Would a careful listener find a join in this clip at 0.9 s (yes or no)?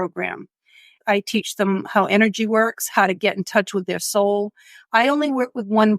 yes